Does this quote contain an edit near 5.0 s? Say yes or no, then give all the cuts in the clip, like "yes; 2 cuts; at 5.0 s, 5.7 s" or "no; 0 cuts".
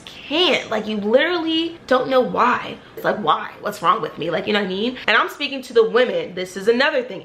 yes; 3 cuts; at 1.8 s, 3.0 s, 5.0 s